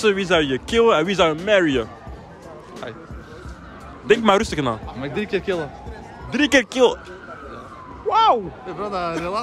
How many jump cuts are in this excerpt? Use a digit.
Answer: 0